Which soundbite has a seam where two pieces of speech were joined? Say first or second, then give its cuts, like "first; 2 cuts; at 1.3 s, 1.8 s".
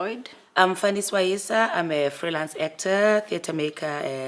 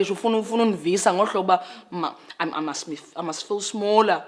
first; 1 cut; at 2.8 s